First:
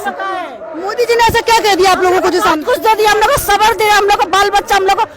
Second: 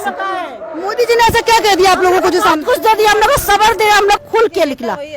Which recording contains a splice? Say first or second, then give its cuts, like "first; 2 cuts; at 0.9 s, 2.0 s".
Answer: second; 1 cut; at 4.2 s